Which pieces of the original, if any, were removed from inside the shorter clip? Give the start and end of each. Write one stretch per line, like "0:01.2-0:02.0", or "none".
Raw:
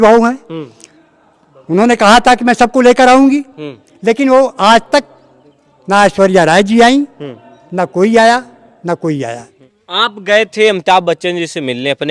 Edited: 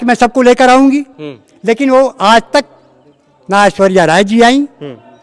none